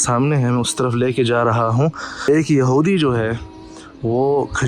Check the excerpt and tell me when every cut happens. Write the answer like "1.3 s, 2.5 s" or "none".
2.3 s